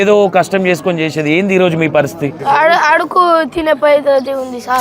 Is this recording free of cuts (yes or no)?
no